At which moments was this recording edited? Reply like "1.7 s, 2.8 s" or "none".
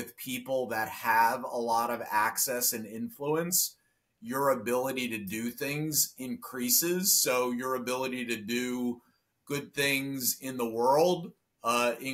none